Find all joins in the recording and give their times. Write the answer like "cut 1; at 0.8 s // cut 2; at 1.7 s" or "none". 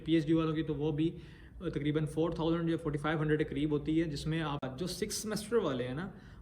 cut 1; at 4.7 s